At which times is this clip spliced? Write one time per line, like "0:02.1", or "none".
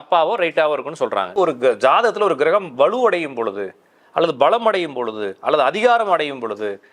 0:01.4